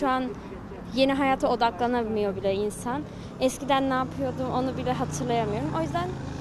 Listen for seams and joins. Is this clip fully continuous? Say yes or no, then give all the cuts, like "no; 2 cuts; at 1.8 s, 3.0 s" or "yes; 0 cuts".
yes; 0 cuts